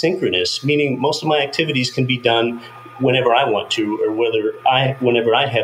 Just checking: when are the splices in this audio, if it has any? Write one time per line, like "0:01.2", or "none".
none